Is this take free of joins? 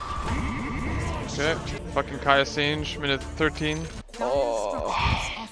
no; 2 cuts; at 1.8 s, 4.0 s

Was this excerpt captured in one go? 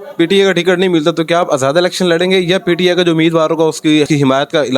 yes; 0 cuts

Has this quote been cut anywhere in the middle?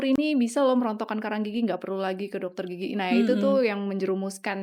no; 0 cuts

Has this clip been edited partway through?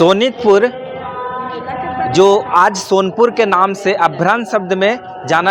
no; 0 cuts

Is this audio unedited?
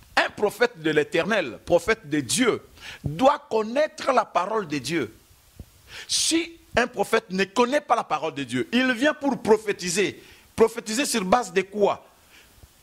yes; 0 cuts

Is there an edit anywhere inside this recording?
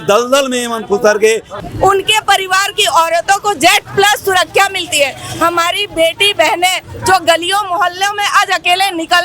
yes; 1 cut; at 1.5 s

